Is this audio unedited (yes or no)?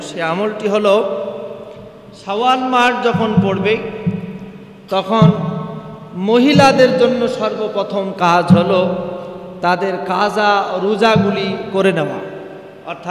yes